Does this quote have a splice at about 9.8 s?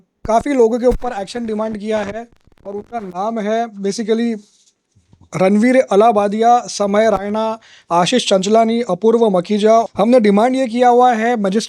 yes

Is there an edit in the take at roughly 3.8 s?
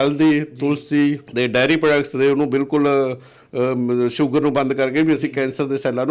no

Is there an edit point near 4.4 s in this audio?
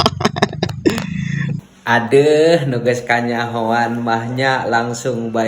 no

